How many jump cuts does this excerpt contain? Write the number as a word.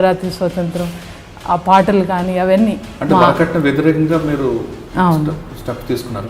one